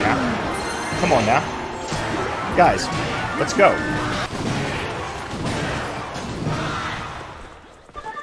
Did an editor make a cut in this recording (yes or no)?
yes